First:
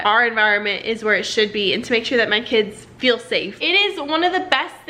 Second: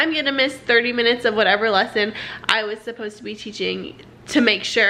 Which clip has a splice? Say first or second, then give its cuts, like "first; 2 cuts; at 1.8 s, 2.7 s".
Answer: first; 1 cut; at 3.5 s